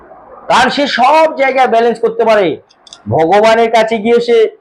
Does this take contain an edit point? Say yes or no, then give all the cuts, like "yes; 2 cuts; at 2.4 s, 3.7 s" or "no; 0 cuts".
no; 0 cuts